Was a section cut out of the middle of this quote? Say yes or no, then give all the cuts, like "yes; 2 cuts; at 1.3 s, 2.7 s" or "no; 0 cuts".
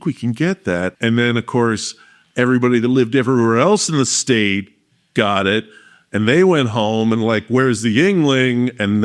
yes; 1 cut; at 0.9 s